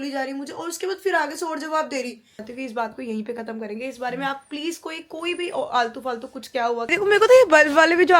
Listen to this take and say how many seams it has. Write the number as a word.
two